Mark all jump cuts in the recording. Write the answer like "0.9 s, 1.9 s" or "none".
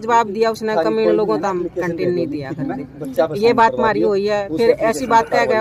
none